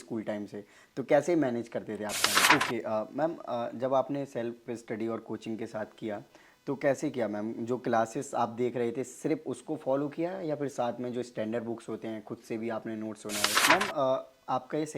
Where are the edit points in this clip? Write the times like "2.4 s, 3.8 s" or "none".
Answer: 2.3 s, 13.5 s